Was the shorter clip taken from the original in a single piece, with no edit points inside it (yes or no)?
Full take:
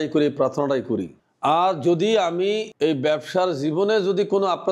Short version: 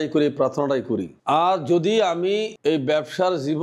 no